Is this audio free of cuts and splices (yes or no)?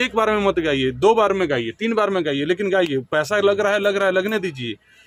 yes